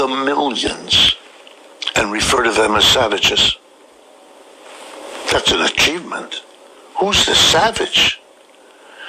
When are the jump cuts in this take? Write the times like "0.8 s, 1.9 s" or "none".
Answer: 3.7 s